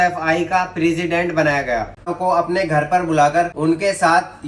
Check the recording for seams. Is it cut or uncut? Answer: cut